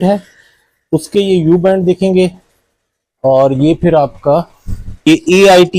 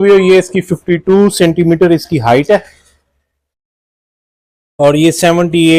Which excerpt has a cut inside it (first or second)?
first